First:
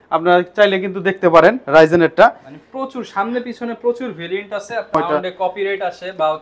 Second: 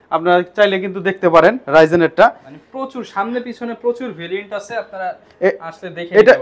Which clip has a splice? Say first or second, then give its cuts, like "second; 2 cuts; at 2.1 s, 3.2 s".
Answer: first; 1 cut; at 4.9 s